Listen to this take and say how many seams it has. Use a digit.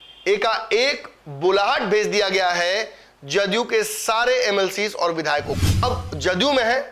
1